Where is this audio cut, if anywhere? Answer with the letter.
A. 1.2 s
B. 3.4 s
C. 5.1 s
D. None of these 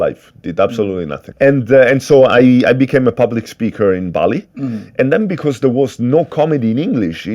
A